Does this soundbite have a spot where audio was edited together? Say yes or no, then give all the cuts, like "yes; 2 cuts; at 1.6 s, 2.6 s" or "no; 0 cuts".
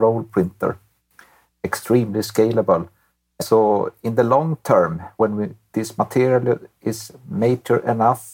yes; 3 cuts; at 1.6 s, 3.3 s, 5.1 s